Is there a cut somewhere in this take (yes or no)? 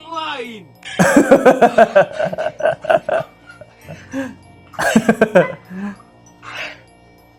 no